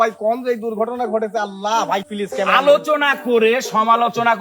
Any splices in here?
no; 0 cuts

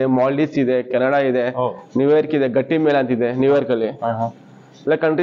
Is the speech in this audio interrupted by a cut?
no; 0 cuts

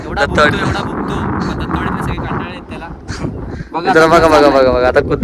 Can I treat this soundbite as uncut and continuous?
yes; 0 cuts

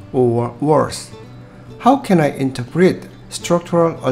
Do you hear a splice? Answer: no; 0 cuts

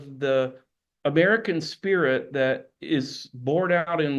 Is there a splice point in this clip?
no; 0 cuts

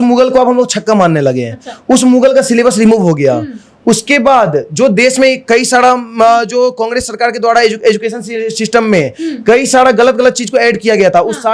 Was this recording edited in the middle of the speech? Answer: no; 0 cuts

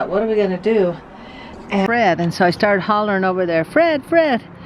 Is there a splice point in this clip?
yes; 1 cut; at 1.9 s

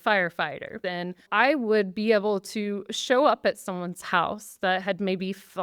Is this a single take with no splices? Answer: no; 1 cut; at 1.1 s

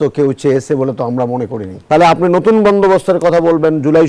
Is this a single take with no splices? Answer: no; 1 cut; at 1.8 s

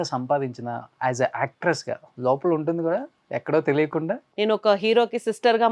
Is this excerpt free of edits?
no; 2 cuts; at 0.9 s, 4.2 s

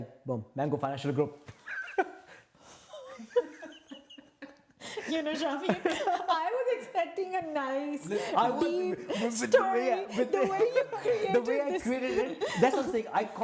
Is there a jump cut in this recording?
no; 0 cuts

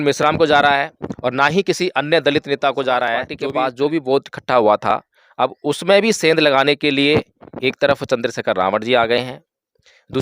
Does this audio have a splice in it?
yes; 1 cut; at 3.3 s

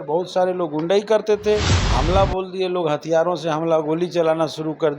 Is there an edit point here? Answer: yes; 1 cut; at 1.8 s

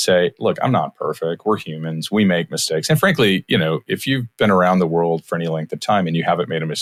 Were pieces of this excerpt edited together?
no; 0 cuts

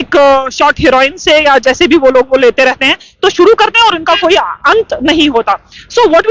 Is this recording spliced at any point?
no; 0 cuts

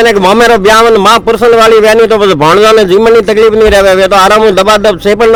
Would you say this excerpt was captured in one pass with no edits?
yes; 0 cuts

